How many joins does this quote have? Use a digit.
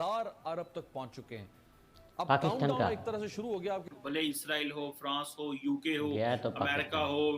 1